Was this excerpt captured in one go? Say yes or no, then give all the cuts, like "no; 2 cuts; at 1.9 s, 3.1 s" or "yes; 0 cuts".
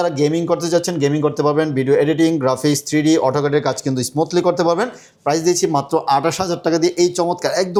yes; 0 cuts